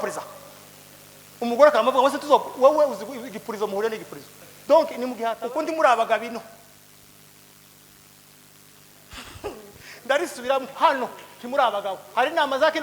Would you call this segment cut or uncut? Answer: cut